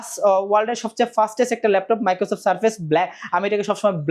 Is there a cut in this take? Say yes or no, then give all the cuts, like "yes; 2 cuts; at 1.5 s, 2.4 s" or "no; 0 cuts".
no; 0 cuts